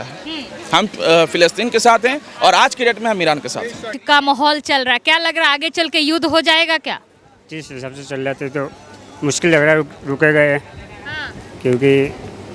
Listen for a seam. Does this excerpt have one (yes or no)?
no